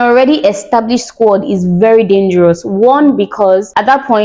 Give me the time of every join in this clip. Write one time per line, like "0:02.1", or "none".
none